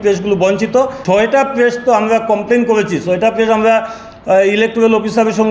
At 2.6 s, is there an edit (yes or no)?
no